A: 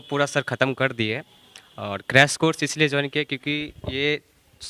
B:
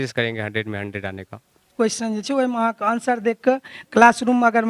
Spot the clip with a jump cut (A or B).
B